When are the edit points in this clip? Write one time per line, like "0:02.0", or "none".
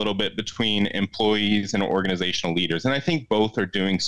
none